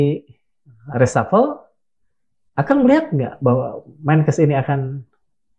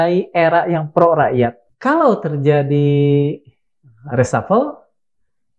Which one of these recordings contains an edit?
second; 1 cut; at 1.6 s

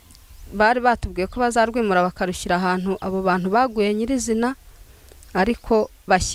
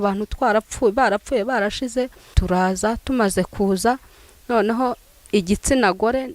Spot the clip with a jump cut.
second; 1 cut; at 2.3 s

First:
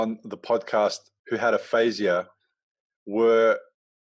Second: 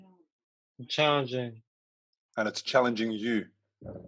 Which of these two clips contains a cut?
first; 1 cut; at 1.1 s

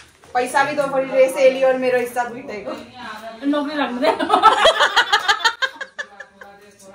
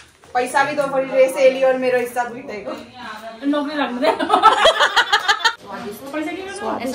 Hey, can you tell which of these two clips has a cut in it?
second; 1 cut; at 5.6 s

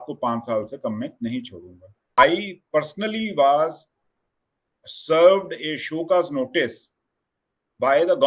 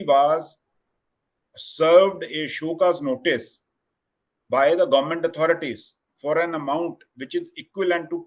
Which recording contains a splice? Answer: first; 1 cut; at 2.0 s

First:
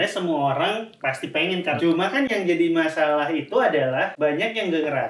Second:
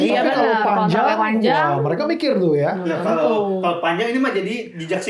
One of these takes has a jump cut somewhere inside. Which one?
first; 2 cuts; at 1.8 s, 4.1 s

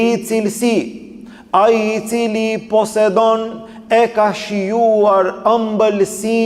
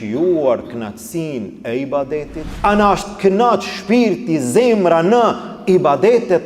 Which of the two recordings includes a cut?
second; 1 cut; at 2.4 s

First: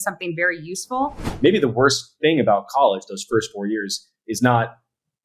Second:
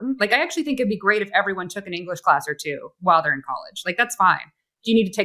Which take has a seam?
first; 1 cut; at 1.2 s

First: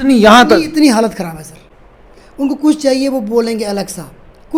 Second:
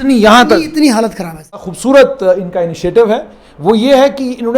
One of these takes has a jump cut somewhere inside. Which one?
second; 1 cut; at 1.7 s

